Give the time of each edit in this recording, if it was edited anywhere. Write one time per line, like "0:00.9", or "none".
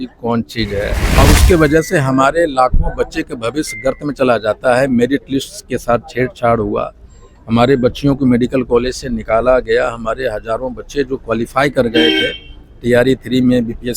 0:01.1